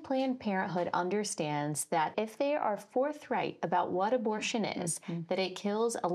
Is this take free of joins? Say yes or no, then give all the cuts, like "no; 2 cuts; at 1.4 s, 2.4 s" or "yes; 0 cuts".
no; 1 cut; at 2.1 s